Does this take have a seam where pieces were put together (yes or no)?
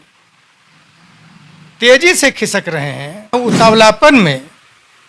yes